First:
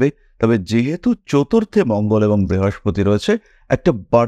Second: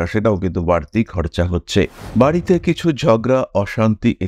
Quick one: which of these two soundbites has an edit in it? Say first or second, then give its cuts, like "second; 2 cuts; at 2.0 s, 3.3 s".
second; 1 cut; at 2.0 s